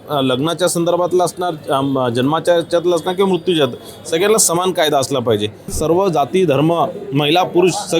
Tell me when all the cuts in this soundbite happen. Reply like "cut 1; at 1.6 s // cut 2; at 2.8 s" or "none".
cut 1; at 5.7 s